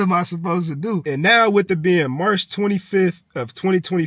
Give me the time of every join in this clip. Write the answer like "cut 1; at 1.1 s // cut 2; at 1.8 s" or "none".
cut 1; at 1.0 s